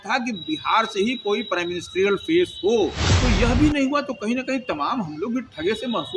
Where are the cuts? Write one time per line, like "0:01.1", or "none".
0:03.1